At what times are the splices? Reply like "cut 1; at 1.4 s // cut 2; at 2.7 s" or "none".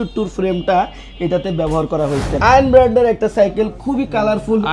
cut 1; at 2.3 s